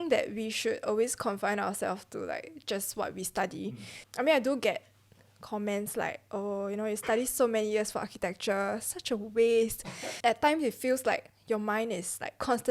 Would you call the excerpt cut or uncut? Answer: cut